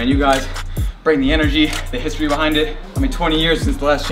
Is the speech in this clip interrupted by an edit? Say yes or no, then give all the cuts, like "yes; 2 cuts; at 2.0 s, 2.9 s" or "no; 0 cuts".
yes; 1 cut; at 2.8 s